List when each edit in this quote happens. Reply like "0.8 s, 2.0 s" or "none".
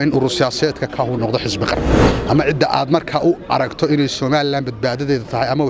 2.1 s